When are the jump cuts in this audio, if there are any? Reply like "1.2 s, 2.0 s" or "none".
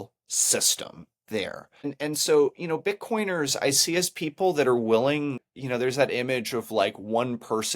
1.9 s, 5.5 s